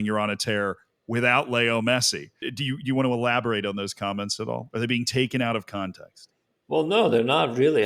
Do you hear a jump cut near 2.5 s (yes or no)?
yes